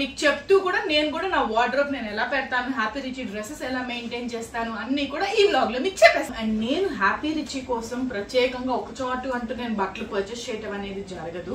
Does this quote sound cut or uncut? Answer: uncut